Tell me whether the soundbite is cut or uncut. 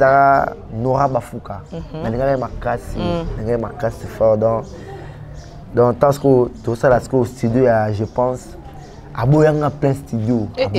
uncut